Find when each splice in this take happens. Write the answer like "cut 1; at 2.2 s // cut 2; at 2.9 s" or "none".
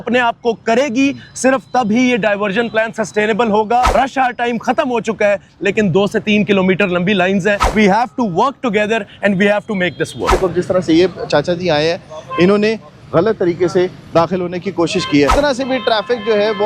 cut 1; at 3.9 s // cut 2; at 7.6 s // cut 3; at 10.3 s // cut 4; at 15.3 s